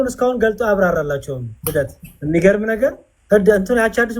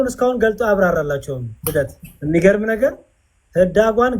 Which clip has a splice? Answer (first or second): first